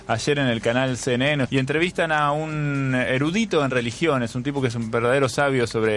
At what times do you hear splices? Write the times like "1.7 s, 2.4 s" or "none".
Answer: 1.5 s